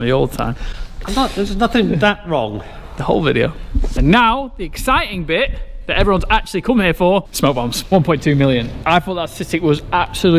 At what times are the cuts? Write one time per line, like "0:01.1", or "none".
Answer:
0:04.0
0:07.8
0:08.8